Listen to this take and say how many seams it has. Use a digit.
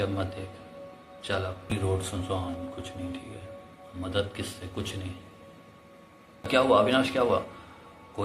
2